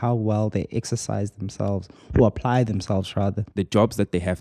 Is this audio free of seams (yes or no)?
no